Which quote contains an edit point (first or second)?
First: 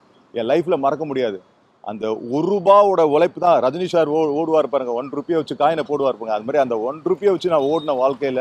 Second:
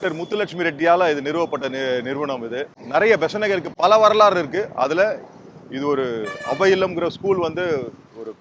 second